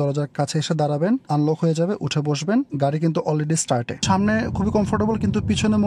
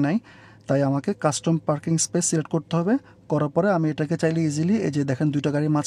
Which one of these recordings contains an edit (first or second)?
first